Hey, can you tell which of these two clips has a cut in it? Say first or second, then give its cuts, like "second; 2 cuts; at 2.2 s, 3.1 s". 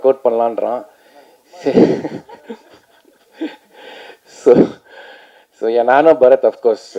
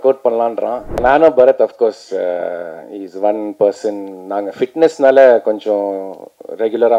second; 1 cut; at 1.0 s